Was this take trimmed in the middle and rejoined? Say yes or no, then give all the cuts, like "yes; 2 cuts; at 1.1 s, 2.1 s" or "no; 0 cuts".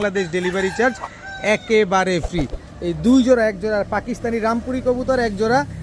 no; 0 cuts